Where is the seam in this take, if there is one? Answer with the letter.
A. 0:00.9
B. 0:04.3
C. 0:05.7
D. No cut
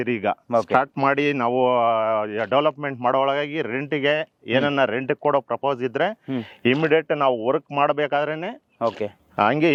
D